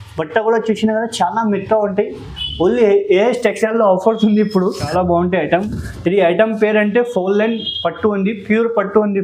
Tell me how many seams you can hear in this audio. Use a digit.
1